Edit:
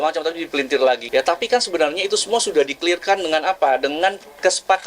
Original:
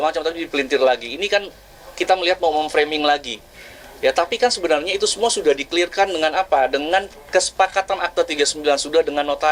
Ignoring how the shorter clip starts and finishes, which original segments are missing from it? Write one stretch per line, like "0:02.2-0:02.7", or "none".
0:01.0-0:03.9